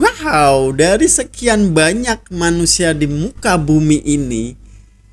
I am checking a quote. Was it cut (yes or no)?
no